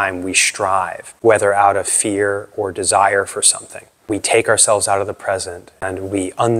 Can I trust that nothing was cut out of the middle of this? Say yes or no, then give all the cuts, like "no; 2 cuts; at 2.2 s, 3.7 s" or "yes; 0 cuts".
no; 3 cuts; at 1.0 s, 4.1 s, 5.8 s